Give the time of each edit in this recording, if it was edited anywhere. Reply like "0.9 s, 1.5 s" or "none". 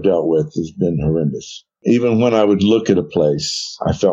none